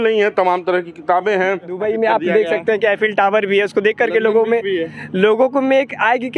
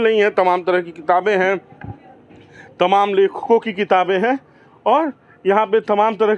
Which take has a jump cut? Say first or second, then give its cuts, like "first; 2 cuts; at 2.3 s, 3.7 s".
first; 1 cut; at 1.8 s